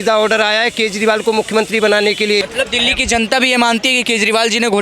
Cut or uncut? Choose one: cut